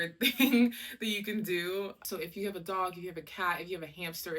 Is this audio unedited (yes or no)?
no